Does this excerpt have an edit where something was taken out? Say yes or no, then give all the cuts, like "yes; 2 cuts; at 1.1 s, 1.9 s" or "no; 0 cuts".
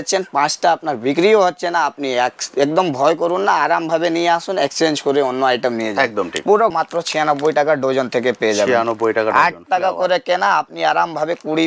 yes; 1 cut; at 6.7 s